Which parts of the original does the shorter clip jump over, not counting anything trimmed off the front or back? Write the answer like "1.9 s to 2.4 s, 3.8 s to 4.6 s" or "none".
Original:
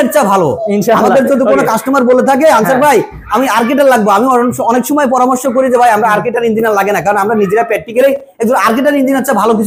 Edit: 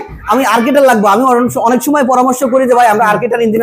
none